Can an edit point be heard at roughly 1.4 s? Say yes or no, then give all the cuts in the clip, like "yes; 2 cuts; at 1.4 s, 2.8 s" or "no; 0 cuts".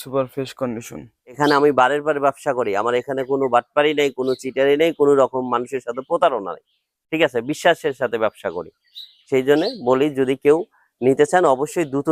yes; 1 cut; at 1.4 s